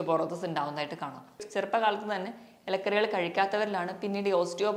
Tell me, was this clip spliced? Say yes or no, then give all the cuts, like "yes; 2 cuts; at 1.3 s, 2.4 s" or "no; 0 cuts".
yes; 1 cut; at 1.4 s